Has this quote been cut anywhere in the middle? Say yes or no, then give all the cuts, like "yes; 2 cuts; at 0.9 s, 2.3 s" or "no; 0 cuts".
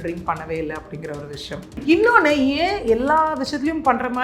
yes; 1 cut; at 1.8 s